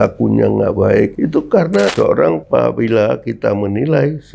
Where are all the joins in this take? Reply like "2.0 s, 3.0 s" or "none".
2.0 s